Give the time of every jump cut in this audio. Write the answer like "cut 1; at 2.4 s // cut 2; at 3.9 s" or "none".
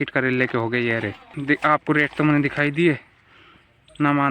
cut 1; at 1.3 s